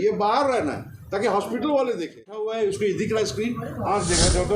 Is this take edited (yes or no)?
yes